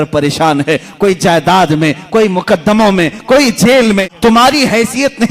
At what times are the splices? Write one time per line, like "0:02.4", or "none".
0:04.1